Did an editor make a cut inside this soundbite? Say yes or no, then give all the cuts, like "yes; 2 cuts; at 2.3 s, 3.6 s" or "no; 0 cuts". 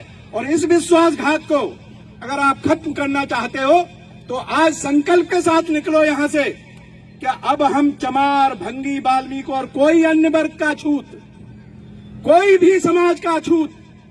no; 0 cuts